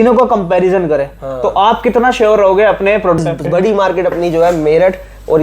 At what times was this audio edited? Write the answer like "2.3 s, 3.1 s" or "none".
3.2 s